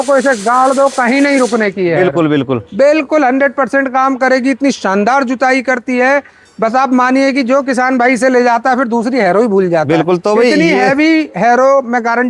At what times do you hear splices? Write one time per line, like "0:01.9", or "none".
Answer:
none